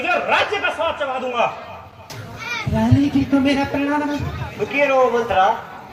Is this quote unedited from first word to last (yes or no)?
yes